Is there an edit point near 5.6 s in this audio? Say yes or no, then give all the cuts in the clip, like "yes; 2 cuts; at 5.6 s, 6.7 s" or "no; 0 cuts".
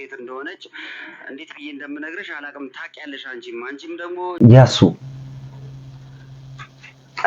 no; 1 cut; at 4.3 s